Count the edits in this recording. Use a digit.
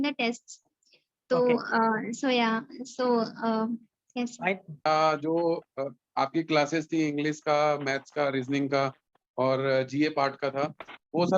1